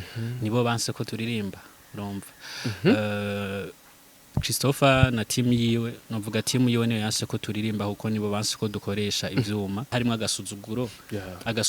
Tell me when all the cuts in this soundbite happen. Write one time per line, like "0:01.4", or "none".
0:09.9